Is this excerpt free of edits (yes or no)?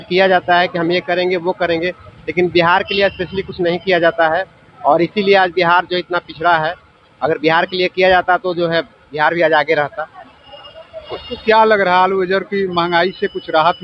yes